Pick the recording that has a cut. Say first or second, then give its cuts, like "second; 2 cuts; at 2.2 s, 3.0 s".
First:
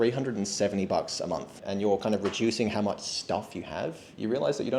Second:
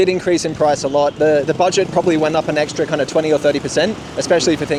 first; 1 cut; at 1.6 s